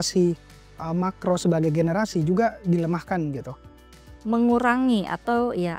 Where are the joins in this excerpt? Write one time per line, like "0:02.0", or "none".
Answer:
0:04.0